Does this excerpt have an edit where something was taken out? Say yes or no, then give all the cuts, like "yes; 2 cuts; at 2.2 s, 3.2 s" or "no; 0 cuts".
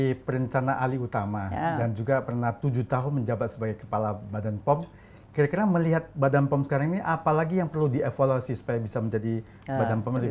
no; 0 cuts